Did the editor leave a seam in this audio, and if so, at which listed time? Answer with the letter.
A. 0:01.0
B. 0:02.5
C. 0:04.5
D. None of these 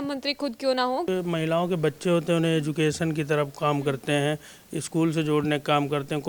A